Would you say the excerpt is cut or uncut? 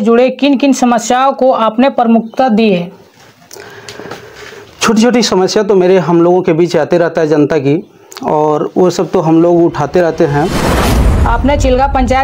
cut